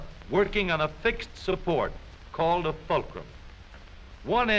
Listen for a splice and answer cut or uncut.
uncut